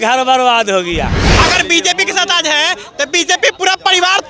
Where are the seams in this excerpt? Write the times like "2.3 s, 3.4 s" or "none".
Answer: 1.2 s